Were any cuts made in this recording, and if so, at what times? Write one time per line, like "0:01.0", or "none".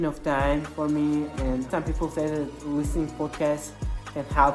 0:01.7

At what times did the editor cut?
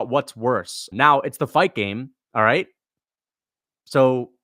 0:00.8
0:02.1

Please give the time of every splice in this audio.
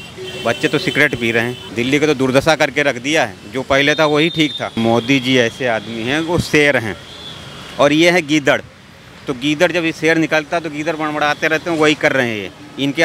0:01.6
0:04.7

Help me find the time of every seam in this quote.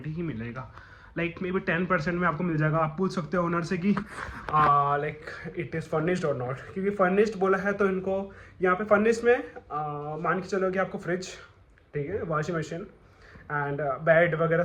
none

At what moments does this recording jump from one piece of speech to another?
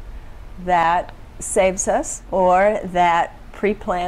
0:02.2

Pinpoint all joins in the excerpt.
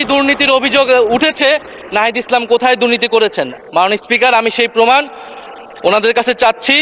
none

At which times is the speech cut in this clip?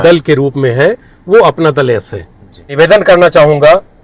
0:02.7

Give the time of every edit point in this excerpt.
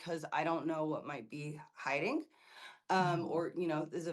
none

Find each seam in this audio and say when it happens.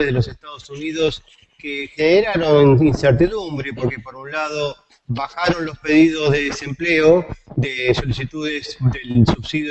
0:06.1

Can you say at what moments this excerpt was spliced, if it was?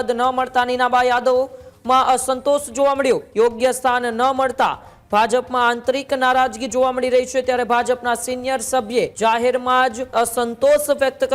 0:03.3
0:09.1
0:10.0

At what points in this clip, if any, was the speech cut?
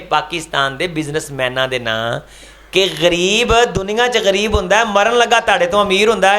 none

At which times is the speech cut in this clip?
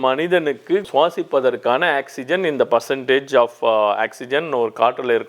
none

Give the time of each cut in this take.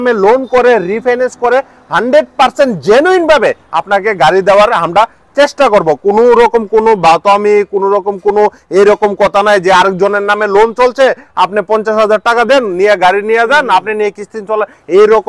none

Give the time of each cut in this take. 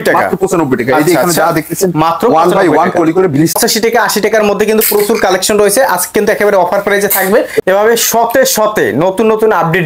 0:03.6
0:07.6

